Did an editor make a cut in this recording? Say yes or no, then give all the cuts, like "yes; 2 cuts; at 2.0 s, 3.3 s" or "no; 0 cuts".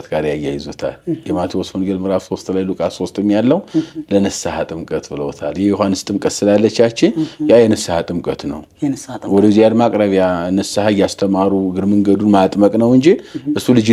no; 0 cuts